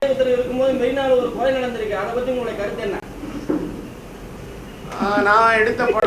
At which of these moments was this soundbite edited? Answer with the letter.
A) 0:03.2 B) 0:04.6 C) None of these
C